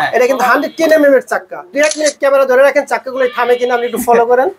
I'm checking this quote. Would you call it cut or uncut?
cut